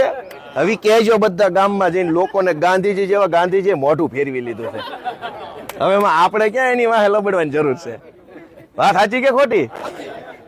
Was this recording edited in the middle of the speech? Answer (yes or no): no